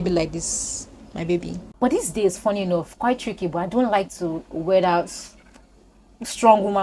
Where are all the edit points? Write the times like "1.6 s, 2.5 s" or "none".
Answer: 1.6 s